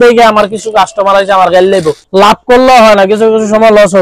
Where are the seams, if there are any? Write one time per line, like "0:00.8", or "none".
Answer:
0:02.0